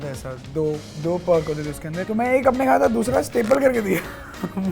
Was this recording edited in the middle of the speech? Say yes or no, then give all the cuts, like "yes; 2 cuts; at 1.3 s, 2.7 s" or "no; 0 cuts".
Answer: yes; 1 cut; at 2.0 s